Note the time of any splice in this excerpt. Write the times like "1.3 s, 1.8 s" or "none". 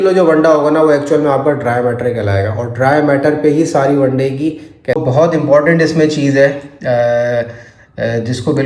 5.0 s